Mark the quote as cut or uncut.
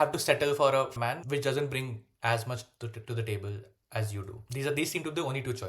cut